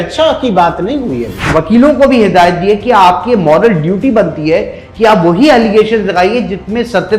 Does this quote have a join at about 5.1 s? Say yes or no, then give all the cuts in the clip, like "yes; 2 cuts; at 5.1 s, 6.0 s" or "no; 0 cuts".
no; 1 cut; at 1.4 s